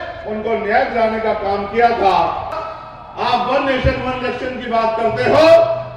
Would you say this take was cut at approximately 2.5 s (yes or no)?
yes